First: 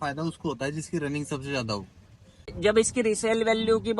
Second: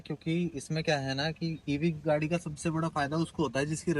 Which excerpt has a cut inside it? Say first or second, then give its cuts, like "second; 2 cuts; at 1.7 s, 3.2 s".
first; 1 cut; at 2.5 s